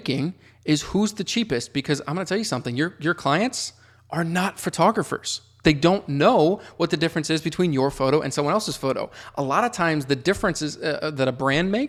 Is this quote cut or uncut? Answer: uncut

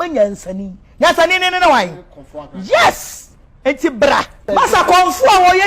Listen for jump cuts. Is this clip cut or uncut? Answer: cut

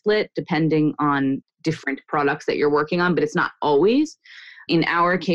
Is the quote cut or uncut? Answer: uncut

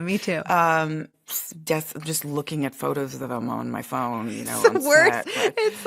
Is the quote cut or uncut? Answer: cut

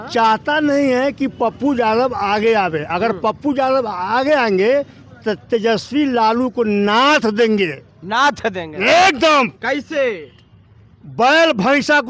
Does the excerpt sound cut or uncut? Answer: uncut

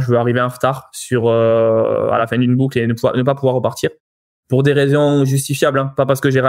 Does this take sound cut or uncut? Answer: uncut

